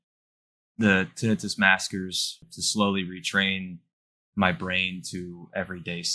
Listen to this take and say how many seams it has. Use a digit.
1